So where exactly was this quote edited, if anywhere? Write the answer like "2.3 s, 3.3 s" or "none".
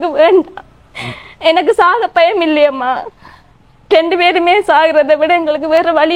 none